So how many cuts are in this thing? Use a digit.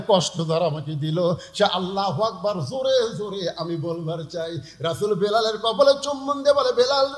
0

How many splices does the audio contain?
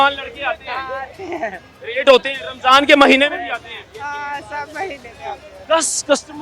1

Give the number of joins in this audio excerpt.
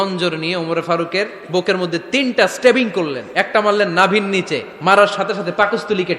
2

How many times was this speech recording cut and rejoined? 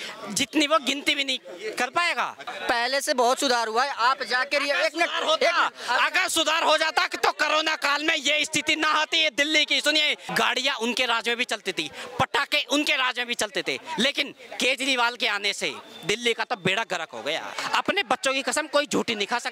3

